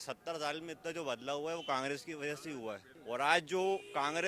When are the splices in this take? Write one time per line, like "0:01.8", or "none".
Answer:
0:02.9